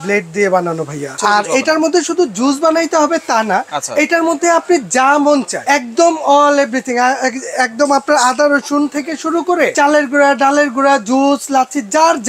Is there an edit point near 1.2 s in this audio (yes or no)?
yes